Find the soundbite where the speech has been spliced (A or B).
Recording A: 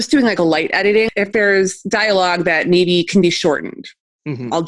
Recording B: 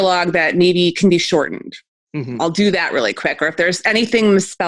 A